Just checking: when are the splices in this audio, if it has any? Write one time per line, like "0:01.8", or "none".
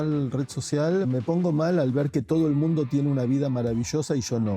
0:01.1